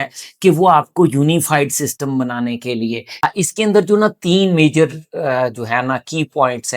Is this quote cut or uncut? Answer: cut